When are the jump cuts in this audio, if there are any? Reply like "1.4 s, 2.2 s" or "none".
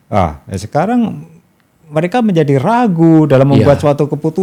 none

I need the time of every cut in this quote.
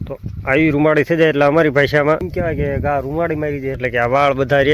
2.3 s, 3.7 s

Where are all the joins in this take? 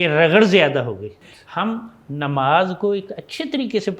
1.3 s

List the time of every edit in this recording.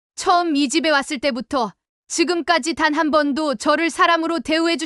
none

